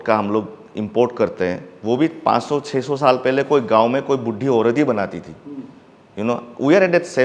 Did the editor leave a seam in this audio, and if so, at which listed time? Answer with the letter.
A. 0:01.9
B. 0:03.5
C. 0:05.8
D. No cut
D